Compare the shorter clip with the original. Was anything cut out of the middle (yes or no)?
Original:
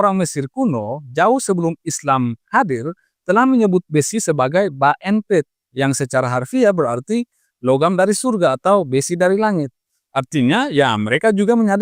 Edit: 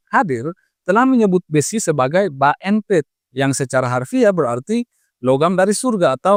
no